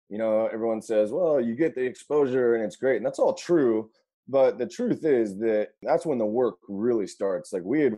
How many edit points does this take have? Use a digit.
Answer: 1